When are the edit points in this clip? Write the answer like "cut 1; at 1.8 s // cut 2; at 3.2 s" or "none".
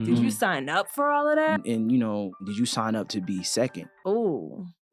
cut 1; at 1.6 s // cut 2; at 2.5 s // cut 3; at 3.9 s